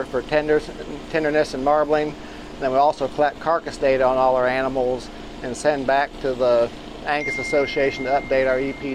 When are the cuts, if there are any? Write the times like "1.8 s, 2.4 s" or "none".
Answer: none